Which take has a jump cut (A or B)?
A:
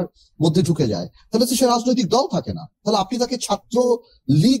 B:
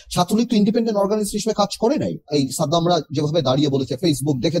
B